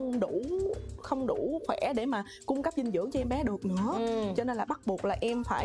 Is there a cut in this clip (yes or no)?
no